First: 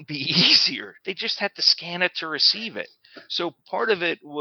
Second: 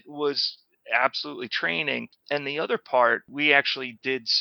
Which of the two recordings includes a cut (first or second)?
second